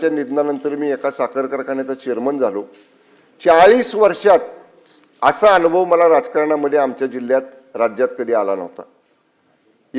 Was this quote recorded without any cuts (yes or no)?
yes